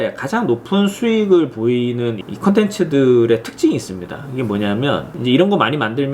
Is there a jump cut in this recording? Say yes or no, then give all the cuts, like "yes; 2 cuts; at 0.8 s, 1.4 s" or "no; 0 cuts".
yes; 1 cut; at 5.1 s